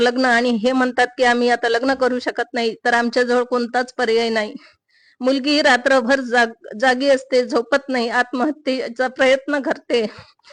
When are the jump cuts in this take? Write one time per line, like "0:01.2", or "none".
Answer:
none